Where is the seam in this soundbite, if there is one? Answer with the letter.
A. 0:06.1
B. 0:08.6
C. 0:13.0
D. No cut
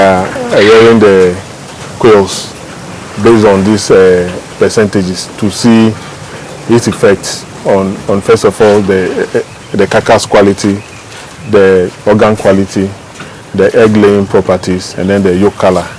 D